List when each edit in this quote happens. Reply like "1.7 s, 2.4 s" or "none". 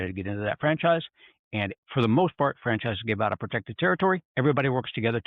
1.7 s, 4.3 s